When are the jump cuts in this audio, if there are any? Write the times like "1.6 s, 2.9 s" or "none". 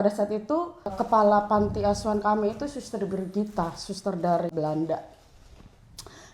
1.0 s, 4.5 s